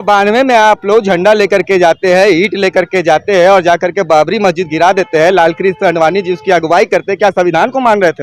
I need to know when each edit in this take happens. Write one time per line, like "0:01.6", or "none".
none